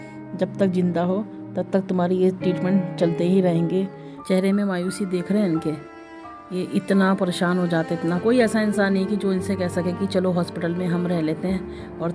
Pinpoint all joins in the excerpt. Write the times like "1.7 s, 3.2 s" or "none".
4.1 s, 8.2 s

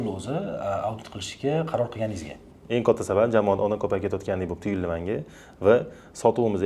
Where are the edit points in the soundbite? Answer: none

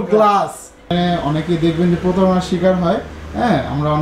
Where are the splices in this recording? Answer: 0.9 s

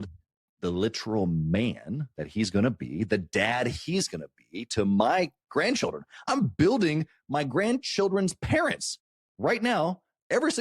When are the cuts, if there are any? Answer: 6.2 s

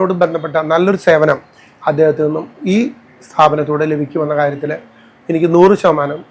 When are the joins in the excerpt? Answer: none

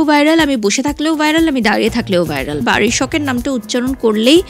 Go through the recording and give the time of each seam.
2.6 s

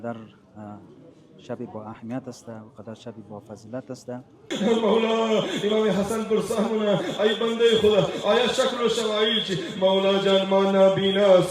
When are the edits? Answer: 4.5 s

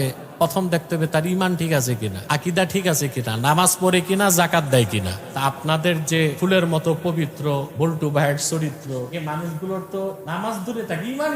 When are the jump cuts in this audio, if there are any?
2.1 s, 5.2 s, 6.4 s, 7.7 s, 9.1 s, 10.2 s

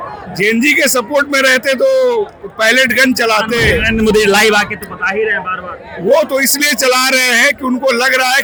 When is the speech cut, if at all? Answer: none

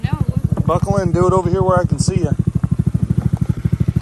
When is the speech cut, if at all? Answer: none

